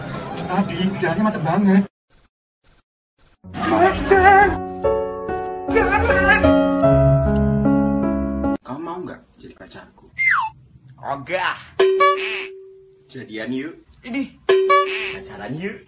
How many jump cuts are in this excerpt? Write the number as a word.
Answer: zero